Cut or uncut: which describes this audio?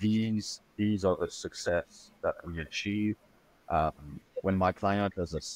uncut